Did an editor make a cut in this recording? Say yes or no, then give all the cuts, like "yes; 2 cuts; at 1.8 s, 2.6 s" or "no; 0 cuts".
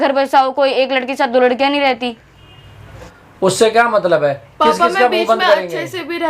yes; 1 cut; at 3.0 s